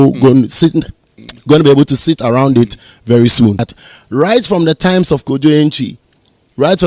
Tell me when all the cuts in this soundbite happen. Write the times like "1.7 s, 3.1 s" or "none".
3.7 s